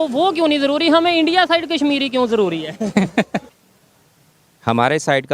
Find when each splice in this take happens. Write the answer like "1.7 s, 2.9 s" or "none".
3.5 s